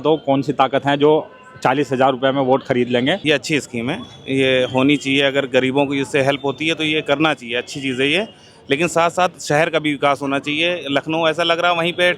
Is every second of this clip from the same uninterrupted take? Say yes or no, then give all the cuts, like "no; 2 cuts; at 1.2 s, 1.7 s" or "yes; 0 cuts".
no; 1 cut; at 3.2 s